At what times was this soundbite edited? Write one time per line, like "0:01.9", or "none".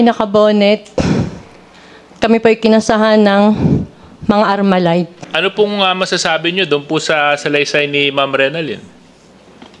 0:05.2